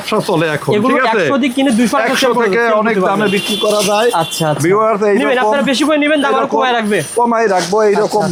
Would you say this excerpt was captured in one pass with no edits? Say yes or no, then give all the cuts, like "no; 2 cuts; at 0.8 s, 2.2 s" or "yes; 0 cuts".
yes; 0 cuts